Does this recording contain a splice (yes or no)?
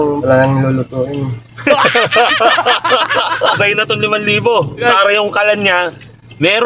yes